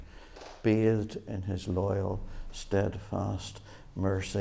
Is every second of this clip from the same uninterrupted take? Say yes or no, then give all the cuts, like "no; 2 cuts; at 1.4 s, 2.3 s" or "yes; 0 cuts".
yes; 0 cuts